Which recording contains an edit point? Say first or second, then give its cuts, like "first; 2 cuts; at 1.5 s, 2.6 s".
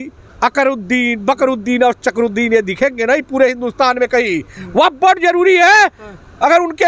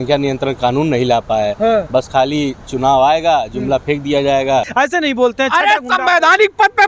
second; 1 cut; at 4.7 s